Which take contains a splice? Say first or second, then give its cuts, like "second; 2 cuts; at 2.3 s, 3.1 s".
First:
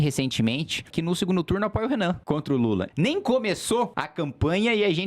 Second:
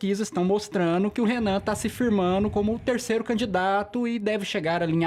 first; 3 cuts; at 0.9 s, 2.8 s, 4.0 s